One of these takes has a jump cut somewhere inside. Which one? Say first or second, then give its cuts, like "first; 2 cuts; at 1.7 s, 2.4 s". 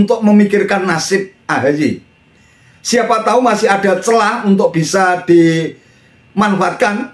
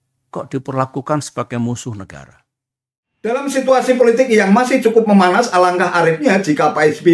second; 1 cut; at 3.3 s